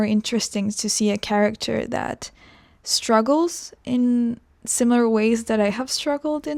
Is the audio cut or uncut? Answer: uncut